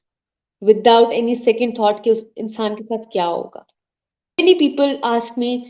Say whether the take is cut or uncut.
cut